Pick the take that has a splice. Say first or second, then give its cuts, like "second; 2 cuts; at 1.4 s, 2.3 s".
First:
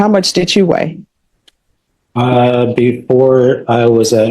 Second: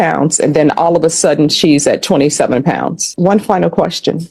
second; 1 cut; at 3.1 s